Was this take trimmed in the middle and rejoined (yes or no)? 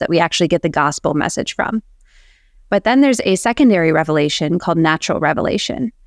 no